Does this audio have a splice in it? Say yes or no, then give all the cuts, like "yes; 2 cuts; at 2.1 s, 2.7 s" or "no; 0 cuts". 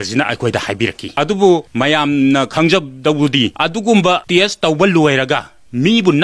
yes; 4 cuts; at 1.0 s, 1.7 s, 3.6 s, 4.2 s